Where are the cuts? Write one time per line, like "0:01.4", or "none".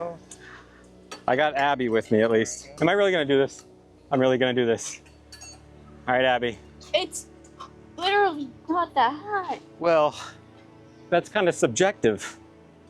0:02.6